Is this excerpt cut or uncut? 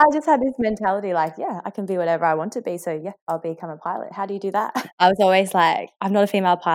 cut